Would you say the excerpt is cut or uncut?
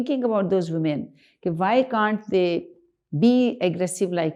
uncut